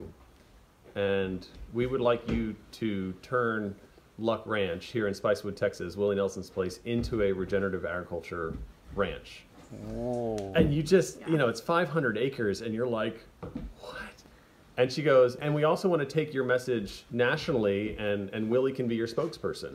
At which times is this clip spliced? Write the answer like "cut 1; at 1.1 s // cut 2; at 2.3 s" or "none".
cut 1; at 14.1 s // cut 2; at 15.4 s // cut 3; at 17.0 s